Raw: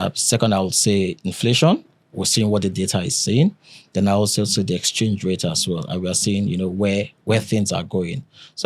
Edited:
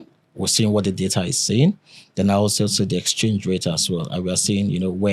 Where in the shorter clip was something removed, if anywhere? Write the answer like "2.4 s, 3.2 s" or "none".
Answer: none